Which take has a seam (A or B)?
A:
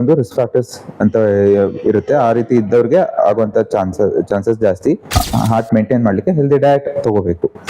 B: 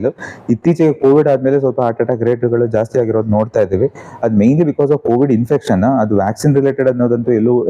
A